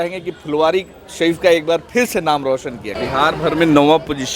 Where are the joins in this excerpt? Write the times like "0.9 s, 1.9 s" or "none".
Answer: 2.9 s